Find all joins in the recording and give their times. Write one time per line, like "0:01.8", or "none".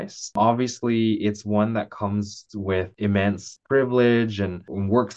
0:02.9

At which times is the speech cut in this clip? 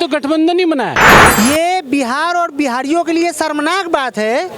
0:01.1

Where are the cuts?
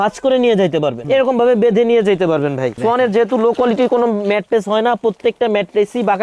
0:01.0
0:02.8

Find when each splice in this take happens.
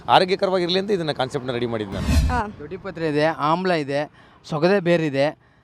0:02.1

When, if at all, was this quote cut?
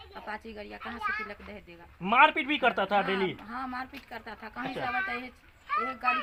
none

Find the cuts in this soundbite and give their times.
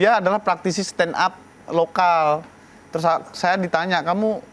none

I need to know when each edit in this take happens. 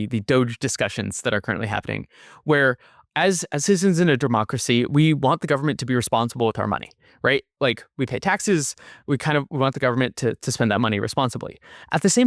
0:03.0

